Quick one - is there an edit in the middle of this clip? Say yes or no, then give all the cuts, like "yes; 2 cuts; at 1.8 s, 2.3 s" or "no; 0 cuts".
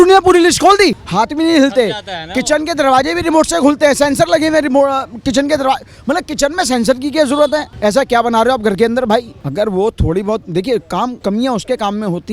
yes; 3 cuts; at 7.7 s, 9.4 s, 11.2 s